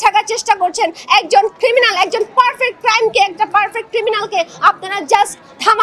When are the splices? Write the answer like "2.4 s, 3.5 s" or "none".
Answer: none